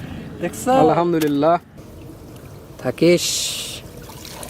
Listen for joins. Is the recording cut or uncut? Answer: cut